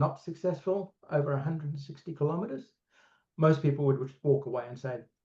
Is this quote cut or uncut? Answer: uncut